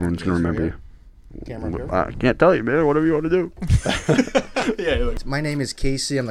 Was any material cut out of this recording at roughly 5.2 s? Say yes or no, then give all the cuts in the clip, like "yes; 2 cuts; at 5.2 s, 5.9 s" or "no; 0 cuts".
yes; 1 cut; at 5.2 s